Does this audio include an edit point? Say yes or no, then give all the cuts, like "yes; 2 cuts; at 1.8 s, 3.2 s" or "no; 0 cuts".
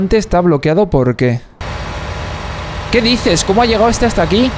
no; 0 cuts